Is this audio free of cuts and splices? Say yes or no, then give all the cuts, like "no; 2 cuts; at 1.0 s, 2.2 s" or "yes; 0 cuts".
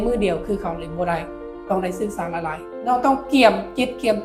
no; 1 cut; at 2.7 s